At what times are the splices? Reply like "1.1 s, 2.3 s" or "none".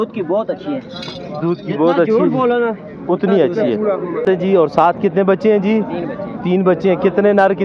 4.2 s